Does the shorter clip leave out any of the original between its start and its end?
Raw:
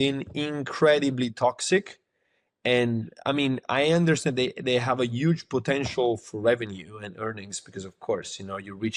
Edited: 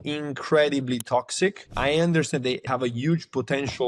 yes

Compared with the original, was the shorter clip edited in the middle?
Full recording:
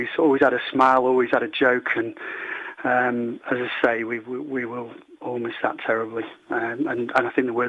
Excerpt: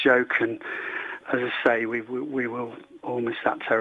yes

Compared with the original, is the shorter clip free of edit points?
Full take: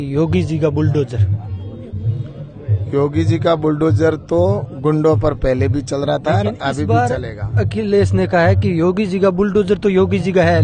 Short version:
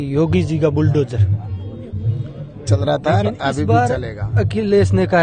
no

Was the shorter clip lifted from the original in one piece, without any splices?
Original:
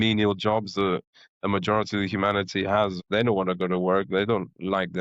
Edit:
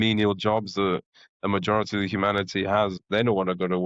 yes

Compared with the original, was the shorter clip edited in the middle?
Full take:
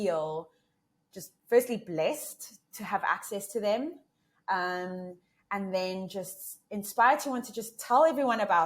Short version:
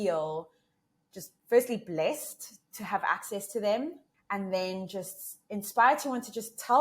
yes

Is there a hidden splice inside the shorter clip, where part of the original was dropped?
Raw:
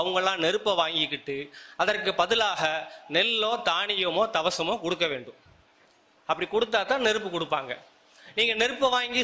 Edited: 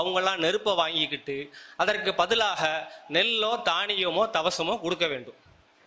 no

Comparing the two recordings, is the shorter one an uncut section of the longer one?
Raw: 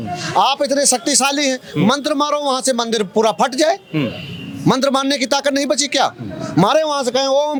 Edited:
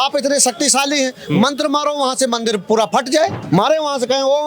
no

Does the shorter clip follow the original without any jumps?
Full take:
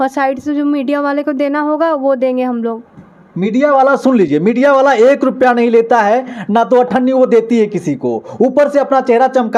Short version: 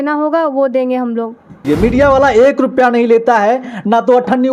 no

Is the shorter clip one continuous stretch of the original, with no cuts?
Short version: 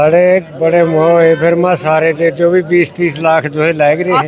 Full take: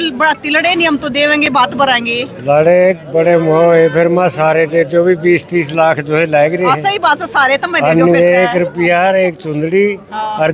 yes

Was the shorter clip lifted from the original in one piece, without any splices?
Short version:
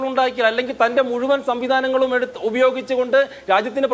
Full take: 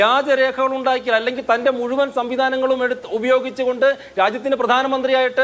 yes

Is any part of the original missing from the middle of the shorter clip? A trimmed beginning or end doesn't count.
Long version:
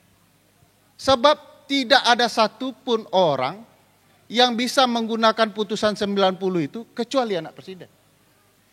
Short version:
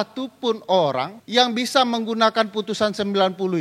yes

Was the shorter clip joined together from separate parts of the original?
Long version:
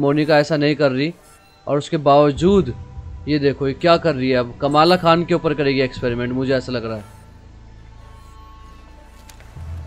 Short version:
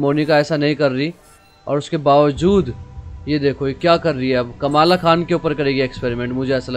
no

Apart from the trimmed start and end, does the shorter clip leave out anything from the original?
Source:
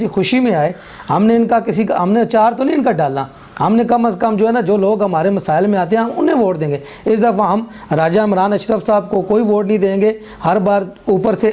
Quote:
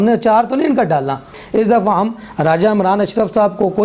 yes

